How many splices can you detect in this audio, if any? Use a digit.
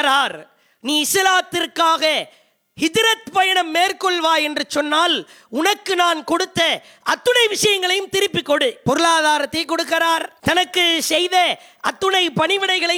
2